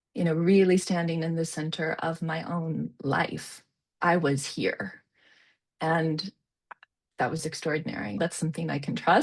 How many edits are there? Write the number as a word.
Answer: two